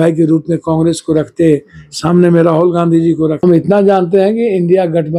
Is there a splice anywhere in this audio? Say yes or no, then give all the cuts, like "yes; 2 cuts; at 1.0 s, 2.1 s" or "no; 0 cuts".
yes; 1 cut; at 3.4 s